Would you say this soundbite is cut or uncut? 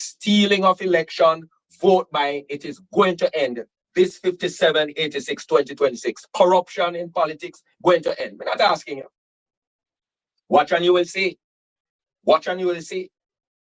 uncut